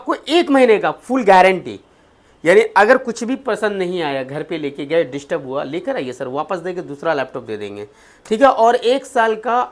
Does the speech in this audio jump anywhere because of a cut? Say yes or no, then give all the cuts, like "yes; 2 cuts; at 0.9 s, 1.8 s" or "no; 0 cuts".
no; 0 cuts